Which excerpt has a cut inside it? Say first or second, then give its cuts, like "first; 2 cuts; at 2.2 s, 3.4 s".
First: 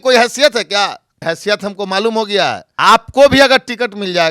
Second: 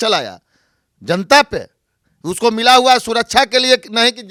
first; 2 cuts; at 1.1 s, 2.7 s